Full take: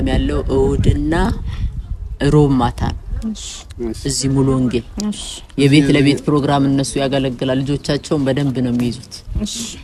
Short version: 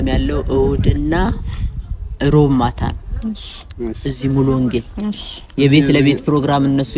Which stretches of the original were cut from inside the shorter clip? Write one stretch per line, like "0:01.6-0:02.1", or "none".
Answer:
none